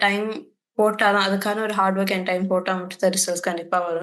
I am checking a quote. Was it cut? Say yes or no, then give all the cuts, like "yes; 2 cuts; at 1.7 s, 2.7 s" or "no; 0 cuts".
no; 0 cuts